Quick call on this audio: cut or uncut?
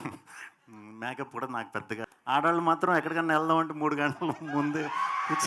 cut